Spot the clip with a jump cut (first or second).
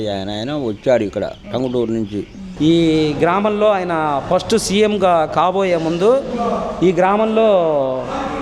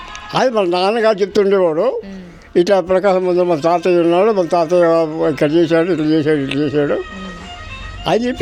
first